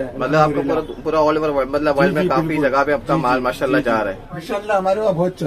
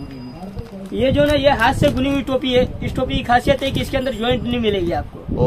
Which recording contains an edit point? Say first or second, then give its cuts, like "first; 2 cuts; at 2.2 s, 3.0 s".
first; 1 cut; at 4.3 s